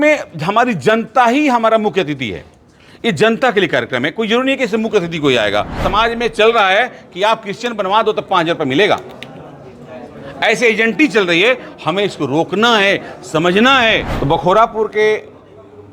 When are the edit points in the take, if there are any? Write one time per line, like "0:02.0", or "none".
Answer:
0:05.8
0:14.1